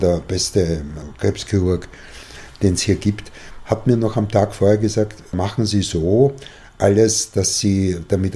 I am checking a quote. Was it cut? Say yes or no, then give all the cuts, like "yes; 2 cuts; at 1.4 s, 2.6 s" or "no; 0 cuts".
yes; 2 cuts; at 1.1 s, 5.3 s